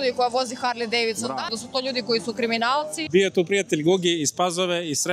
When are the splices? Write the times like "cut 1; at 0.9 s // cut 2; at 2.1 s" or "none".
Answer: cut 1; at 1.6 s // cut 2; at 3.0 s